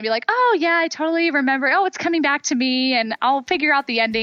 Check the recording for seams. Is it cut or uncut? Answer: uncut